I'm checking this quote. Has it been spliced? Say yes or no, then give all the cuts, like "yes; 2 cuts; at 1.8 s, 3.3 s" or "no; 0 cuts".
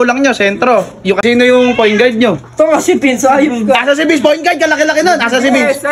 yes; 1 cut; at 1.2 s